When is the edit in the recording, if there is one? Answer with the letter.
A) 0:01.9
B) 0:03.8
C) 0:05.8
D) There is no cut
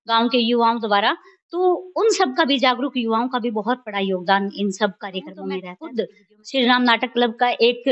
C